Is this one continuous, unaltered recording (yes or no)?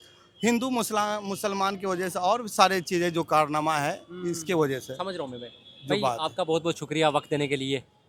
yes